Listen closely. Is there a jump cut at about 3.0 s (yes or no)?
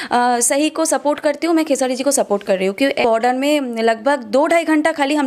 yes